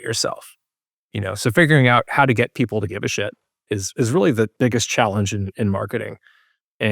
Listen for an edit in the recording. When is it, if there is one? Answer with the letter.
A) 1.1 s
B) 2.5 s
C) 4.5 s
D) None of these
C